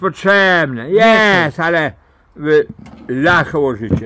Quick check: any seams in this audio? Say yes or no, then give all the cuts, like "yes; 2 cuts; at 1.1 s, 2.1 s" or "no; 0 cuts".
no; 0 cuts